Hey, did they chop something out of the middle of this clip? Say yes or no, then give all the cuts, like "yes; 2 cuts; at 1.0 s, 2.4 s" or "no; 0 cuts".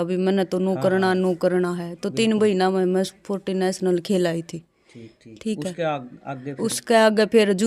no; 0 cuts